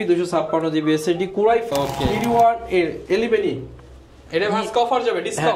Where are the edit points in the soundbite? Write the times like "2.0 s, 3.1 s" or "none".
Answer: 1.7 s

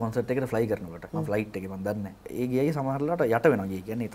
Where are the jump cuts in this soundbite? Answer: 1.0 s, 2.2 s

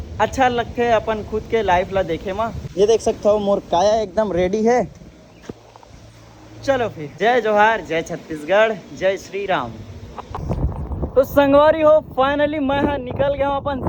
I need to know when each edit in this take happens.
none

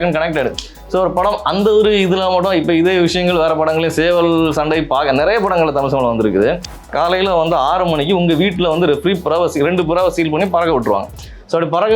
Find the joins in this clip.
6.9 s

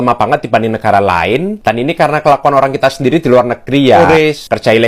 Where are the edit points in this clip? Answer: 4.0 s

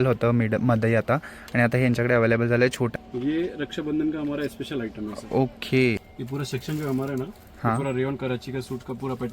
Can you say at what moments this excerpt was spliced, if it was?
2.9 s, 6.0 s

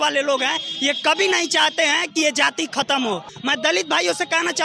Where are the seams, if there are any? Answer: 3.3 s

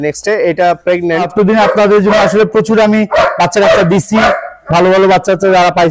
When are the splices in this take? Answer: 1.3 s

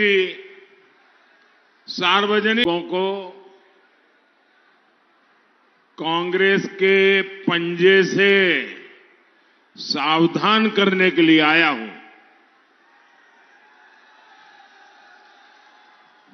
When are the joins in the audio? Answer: 2.6 s

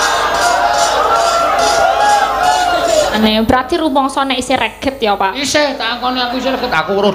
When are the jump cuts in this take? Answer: 3.2 s

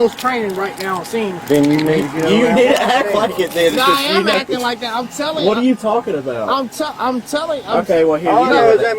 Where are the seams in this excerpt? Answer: none

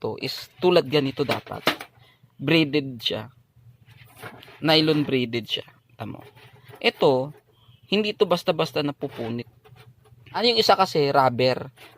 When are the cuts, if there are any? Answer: 10.4 s

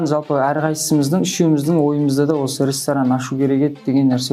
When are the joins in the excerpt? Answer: none

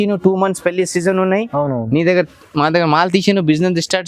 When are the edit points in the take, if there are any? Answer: none

